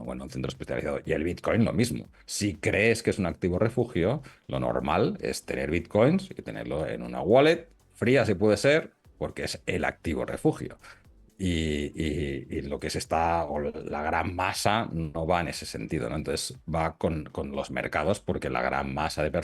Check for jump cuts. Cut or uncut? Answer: uncut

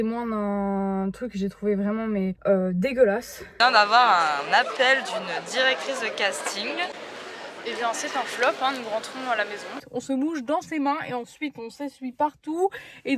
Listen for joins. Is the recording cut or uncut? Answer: cut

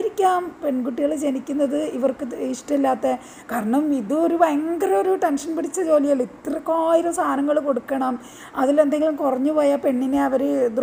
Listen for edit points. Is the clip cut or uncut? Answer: uncut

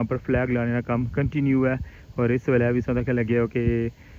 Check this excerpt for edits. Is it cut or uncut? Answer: uncut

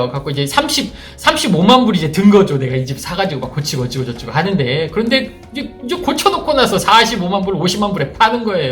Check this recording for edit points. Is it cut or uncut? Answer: uncut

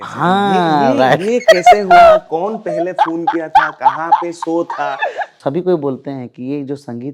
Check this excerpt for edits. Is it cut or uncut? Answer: cut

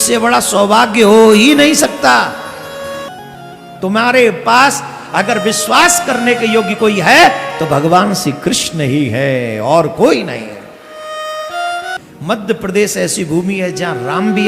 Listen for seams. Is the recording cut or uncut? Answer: cut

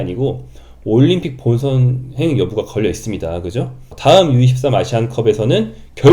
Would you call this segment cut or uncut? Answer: cut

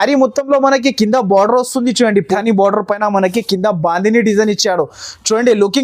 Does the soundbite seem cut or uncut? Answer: cut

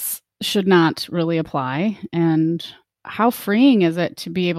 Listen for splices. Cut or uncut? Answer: uncut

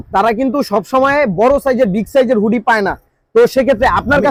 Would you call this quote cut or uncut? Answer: uncut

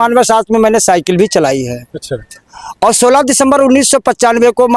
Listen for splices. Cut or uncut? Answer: uncut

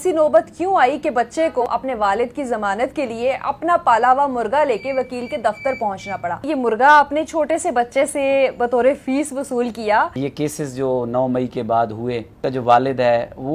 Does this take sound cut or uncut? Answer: cut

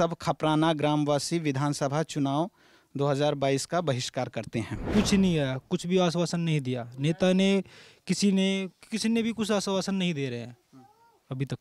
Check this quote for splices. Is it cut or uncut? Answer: cut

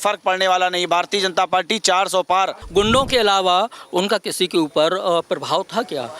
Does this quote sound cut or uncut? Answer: cut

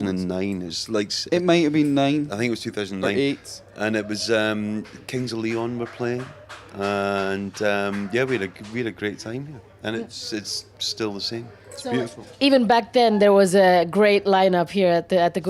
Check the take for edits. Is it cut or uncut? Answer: cut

